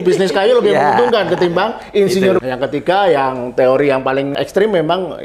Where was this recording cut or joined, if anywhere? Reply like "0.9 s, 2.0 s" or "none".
2.4 s, 4.3 s